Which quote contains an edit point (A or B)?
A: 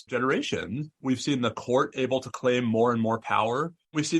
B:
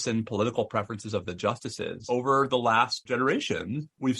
B